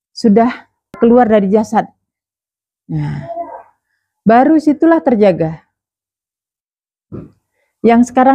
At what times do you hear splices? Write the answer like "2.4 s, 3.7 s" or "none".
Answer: 1.0 s